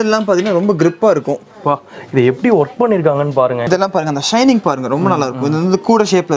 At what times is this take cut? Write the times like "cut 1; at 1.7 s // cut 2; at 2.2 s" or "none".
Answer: cut 1; at 3.7 s